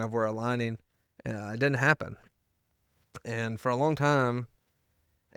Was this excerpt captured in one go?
yes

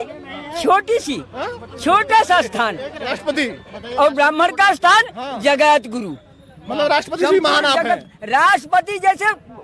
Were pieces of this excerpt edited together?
no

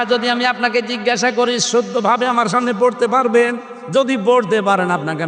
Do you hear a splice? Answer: no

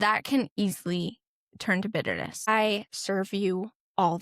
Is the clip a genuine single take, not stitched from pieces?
no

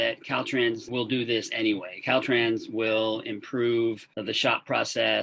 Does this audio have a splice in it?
no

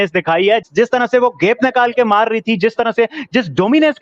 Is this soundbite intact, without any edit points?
yes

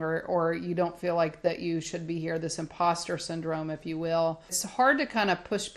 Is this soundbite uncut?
no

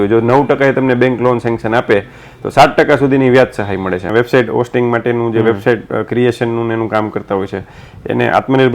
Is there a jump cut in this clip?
yes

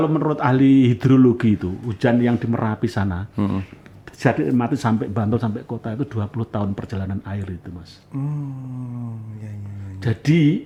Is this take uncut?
yes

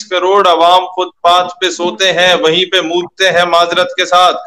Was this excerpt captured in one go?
yes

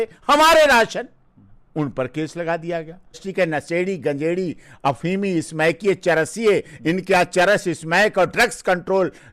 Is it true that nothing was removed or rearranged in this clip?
no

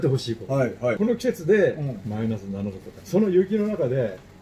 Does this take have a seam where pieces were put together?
yes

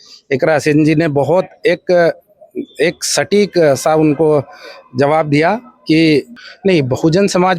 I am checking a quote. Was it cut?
yes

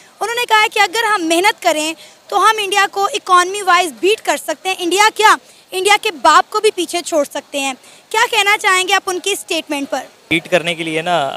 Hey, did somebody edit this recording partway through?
yes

